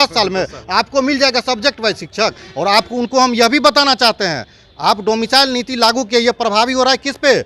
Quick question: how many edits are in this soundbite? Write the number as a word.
zero